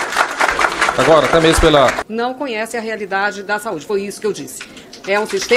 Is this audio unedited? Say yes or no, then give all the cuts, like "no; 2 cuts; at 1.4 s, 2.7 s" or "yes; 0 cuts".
no; 1 cut; at 2.0 s